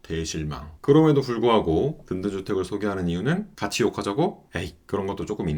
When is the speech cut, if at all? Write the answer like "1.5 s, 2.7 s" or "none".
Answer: none